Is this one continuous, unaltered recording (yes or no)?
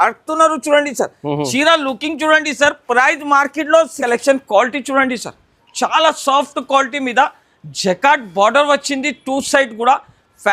no